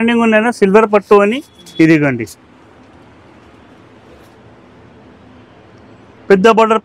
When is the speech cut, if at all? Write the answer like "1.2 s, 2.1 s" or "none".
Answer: none